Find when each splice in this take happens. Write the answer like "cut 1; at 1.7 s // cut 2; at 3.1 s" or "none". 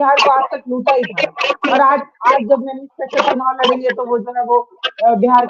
none

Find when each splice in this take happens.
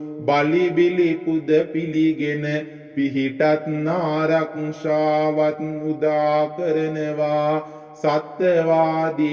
cut 1; at 6.5 s

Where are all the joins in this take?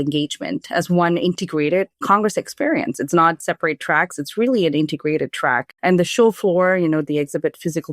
cut 1; at 5.7 s

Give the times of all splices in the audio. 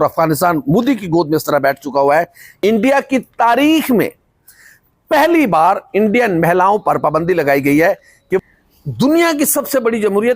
cut 1; at 2.4 s // cut 2; at 8.4 s

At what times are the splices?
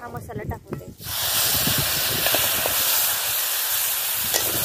none

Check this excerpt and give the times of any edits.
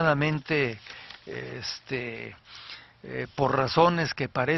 cut 1; at 1.4 s

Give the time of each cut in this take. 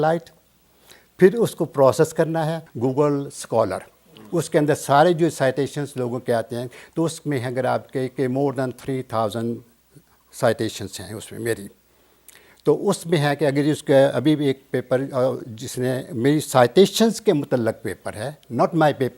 cut 1; at 2.6 s

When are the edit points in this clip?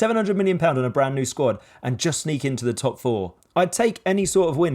cut 1; at 3.3 s

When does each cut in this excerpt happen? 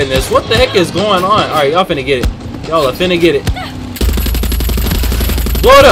none

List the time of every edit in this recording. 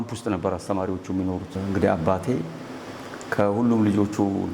cut 1; at 1.5 s

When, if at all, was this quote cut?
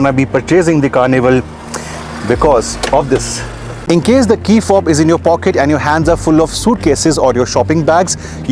cut 1; at 3.6 s

